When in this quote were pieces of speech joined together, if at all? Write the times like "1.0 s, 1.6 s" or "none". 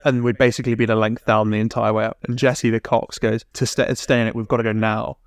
2.2 s, 3.5 s